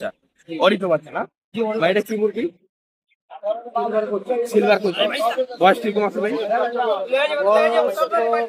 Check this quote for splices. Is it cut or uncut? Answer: cut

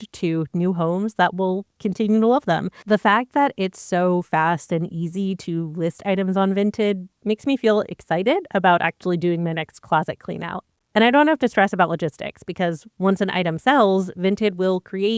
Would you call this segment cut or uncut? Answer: cut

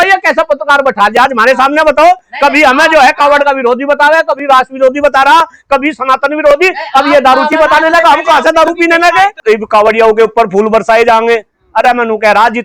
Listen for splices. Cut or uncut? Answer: cut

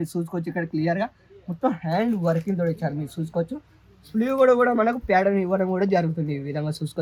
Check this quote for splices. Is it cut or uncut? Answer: uncut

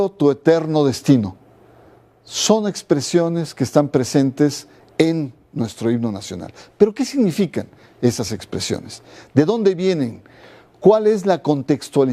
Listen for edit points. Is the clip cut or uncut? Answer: cut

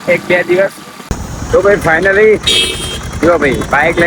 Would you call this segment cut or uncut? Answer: uncut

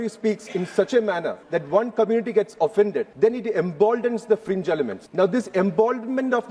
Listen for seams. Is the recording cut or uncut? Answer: cut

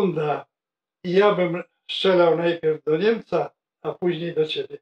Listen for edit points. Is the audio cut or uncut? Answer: uncut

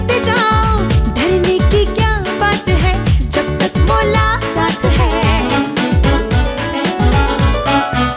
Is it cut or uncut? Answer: uncut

